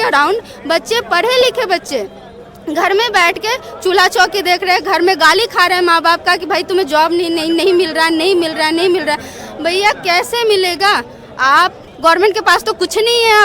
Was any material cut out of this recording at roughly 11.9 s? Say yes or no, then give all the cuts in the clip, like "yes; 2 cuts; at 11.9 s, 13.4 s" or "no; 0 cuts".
yes; 1 cut; at 11.9 s